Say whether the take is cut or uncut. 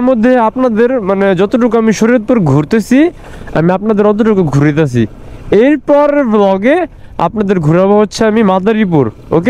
uncut